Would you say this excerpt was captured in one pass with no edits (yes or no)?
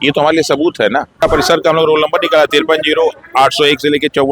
no